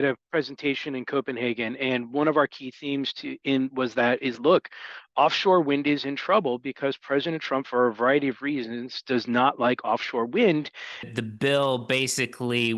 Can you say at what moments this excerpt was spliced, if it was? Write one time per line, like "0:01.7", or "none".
0:11.0